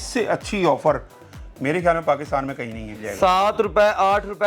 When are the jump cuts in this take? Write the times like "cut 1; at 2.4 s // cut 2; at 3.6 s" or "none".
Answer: cut 1; at 3.0 s